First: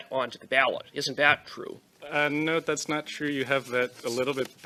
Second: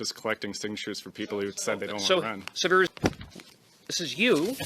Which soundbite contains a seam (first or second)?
second